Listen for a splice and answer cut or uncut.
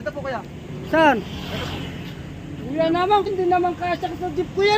cut